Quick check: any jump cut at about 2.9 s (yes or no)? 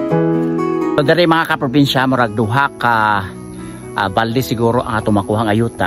no